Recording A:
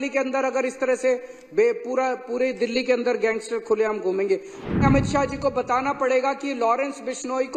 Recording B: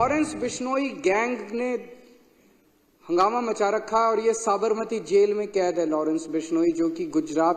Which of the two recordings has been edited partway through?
A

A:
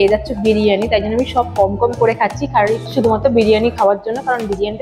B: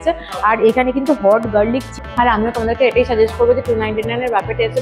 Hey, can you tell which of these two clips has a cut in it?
B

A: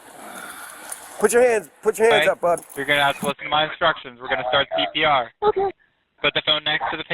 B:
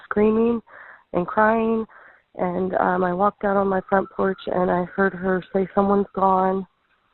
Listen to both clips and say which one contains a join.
A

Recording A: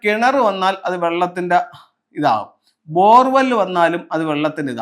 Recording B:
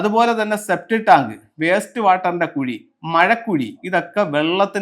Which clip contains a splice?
B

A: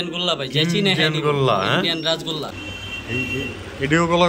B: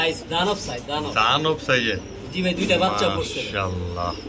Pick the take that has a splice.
A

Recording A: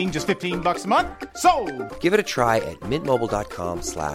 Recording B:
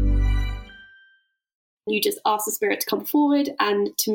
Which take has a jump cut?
B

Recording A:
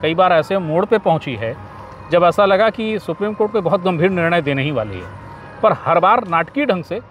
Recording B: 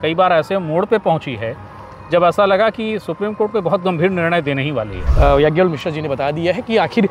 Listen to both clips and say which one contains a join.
B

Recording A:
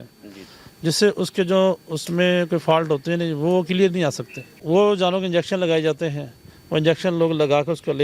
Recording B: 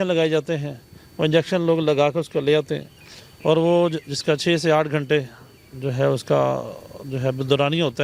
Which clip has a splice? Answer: A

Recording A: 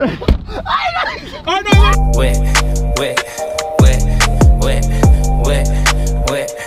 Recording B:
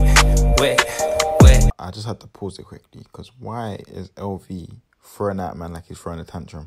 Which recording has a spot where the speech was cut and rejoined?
B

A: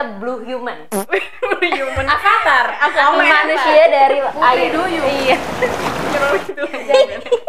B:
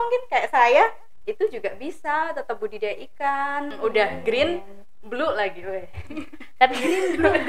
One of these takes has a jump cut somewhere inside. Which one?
B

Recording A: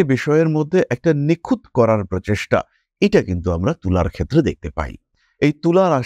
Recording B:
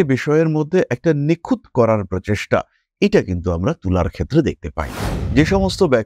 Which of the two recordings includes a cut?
B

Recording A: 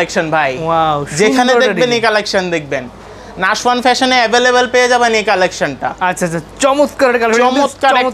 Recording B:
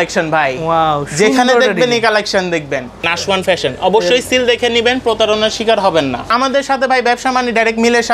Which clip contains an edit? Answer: B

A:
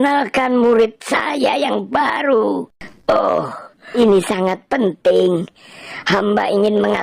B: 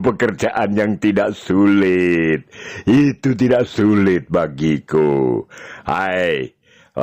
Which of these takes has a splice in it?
A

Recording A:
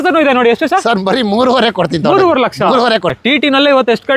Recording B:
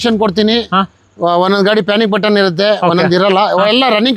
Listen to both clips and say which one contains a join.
A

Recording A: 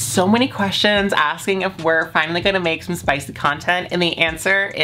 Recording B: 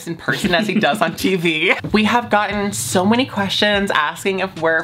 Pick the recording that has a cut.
B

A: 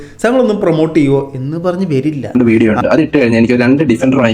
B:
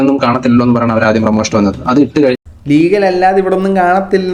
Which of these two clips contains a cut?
A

